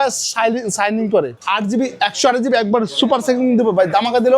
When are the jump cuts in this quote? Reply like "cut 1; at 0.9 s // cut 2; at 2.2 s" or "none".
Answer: cut 1; at 1.4 s